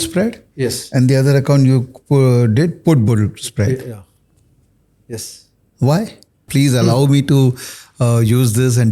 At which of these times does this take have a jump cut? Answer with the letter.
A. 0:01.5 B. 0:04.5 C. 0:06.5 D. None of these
C